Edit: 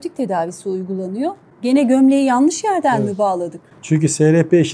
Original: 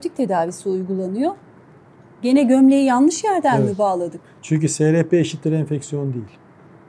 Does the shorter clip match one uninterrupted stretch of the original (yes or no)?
no